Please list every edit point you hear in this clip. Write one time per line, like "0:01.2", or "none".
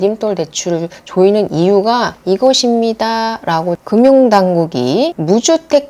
0:03.8

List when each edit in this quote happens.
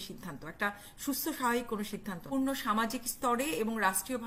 0:02.3

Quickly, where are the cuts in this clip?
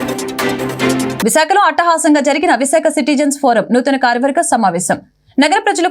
0:01.2

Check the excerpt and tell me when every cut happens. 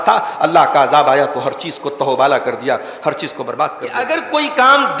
0:03.9

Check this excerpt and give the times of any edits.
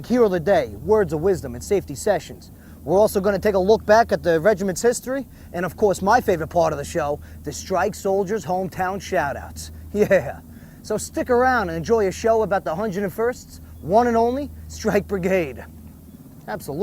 0:02.2

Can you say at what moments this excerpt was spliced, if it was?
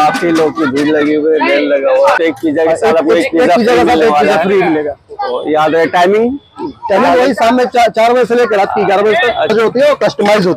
0:02.2
0:09.5

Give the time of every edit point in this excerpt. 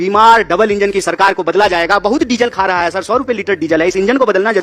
none

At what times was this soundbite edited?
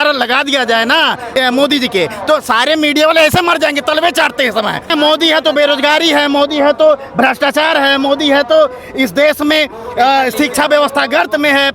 0:01.2
0:04.9

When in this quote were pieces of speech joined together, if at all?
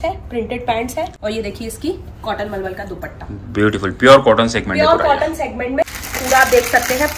0:01.1
0:05.9

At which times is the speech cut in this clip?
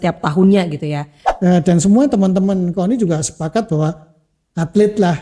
0:01.2

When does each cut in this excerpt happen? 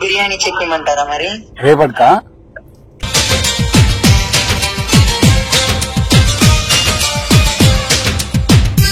none

